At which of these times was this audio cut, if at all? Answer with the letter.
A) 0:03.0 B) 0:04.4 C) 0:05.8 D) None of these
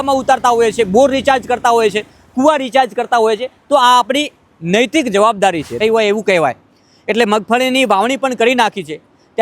C